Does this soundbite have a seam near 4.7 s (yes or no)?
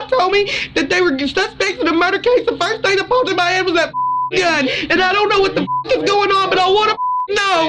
yes